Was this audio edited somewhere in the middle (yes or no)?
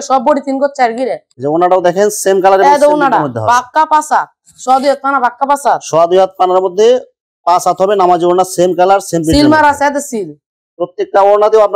no